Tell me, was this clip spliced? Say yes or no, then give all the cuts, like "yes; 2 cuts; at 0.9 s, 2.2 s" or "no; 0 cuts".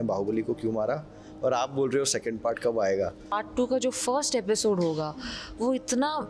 yes; 1 cut; at 3.3 s